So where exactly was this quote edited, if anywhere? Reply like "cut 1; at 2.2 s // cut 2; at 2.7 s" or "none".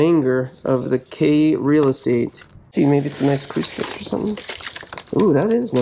cut 1; at 2.7 s